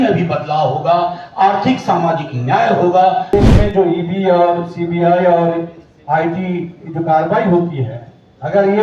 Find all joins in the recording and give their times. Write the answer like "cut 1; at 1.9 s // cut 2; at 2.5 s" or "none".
cut 1; at 3.3 s